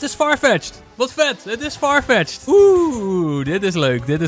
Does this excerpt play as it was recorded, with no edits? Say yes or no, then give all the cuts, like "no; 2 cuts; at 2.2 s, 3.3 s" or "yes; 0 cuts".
no; 1 cut; at 2.4 s